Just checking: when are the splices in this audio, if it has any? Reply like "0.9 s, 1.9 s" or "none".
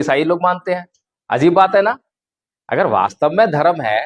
none